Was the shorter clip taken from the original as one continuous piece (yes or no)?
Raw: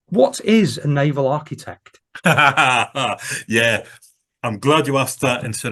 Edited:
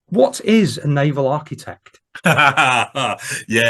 yes